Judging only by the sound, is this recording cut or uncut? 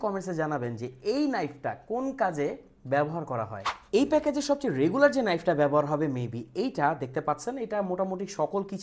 uncut